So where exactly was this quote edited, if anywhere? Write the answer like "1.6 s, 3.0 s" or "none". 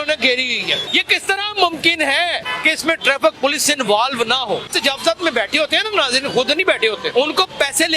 0.8 s, 2.5 s, 4.7 s, 7.1 s